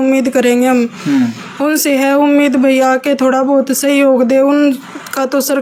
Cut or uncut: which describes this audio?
uncut